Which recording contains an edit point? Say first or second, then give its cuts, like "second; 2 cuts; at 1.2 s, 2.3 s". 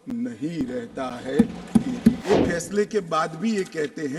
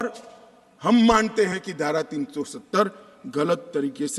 first; 1 cut; at 2.2 s